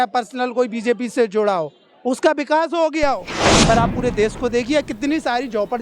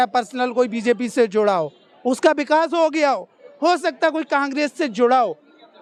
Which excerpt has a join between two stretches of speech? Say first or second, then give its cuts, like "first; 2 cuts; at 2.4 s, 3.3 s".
first; 1 cut; at 3.4 s